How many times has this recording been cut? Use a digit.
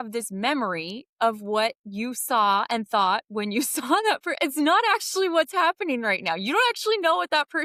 0